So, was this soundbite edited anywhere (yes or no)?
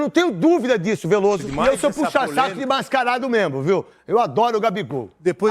yes